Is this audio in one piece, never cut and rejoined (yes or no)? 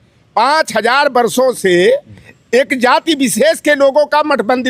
yes